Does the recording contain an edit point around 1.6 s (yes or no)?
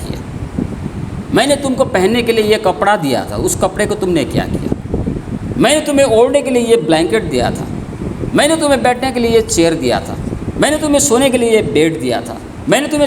no